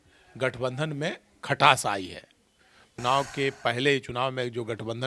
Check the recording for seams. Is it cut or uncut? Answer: cut